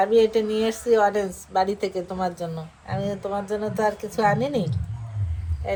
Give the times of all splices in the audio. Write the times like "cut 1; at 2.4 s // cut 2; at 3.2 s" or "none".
none